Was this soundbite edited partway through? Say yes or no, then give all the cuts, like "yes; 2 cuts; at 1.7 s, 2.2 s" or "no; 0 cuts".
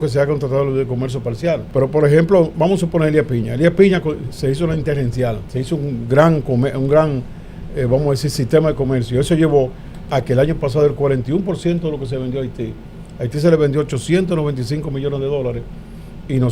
yes; 2 cuts; at 1.7 s, 5.4 s